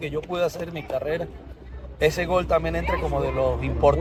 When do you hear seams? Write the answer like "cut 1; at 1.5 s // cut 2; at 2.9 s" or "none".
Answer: none